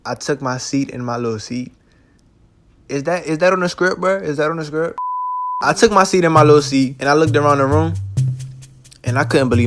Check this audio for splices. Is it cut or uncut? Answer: uncut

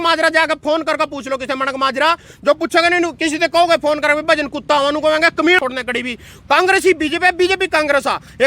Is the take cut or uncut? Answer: cut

